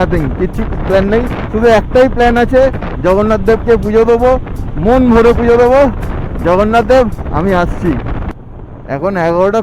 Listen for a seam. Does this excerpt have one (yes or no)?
no